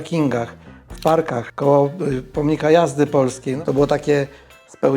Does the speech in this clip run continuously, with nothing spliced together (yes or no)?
no